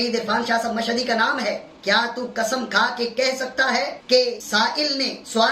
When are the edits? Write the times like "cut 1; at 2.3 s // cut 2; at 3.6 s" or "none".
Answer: none